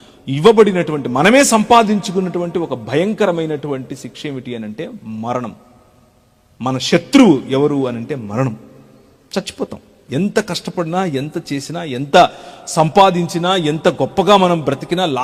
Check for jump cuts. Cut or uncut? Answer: uncut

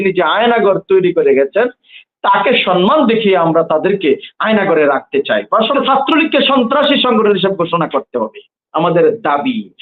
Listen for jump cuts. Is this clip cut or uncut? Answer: cut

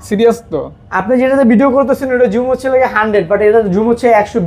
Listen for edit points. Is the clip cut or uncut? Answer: uncut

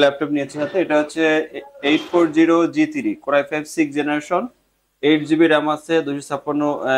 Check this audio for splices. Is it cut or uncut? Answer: uncut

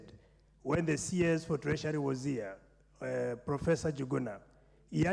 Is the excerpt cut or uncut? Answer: uncut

